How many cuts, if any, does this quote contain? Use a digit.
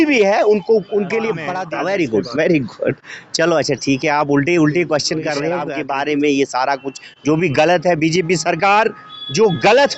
2